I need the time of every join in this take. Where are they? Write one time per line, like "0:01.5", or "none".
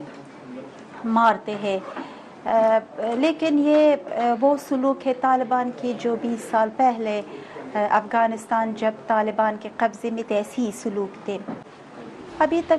0:11.7